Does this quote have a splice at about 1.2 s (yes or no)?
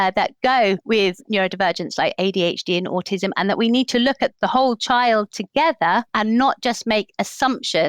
yes